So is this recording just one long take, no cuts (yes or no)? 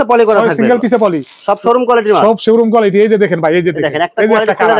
yes